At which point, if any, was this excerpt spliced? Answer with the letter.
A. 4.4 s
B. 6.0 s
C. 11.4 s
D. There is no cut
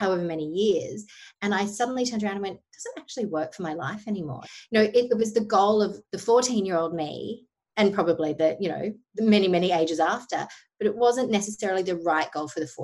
A